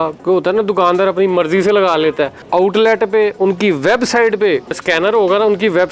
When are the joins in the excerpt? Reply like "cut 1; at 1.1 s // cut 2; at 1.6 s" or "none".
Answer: cut 1; at 2.4 s // cut 2; at 4.8 s